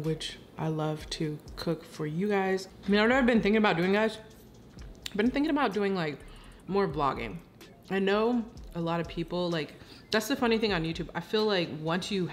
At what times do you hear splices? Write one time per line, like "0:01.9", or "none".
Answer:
0:02.7